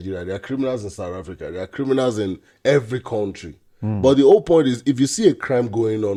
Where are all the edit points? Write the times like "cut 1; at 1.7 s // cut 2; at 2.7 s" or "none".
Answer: none